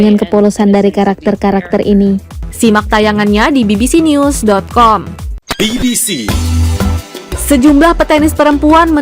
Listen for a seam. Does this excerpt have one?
yes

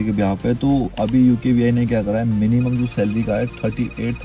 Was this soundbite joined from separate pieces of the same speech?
no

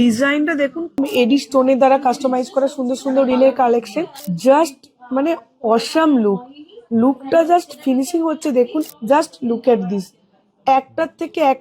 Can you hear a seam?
yes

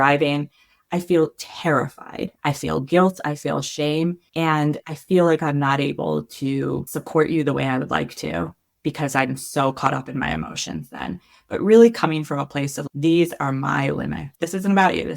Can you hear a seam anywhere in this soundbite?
yes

